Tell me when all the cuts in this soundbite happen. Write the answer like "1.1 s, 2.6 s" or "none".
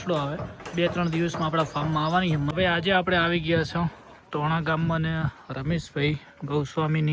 2.5 s